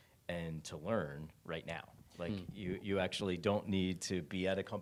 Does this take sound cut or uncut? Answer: uncut